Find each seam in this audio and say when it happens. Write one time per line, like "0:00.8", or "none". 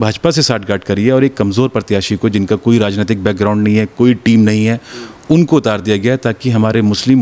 none